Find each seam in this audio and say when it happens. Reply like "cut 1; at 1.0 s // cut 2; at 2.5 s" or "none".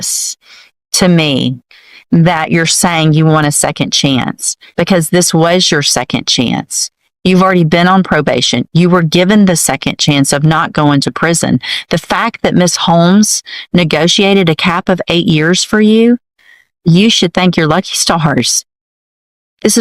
none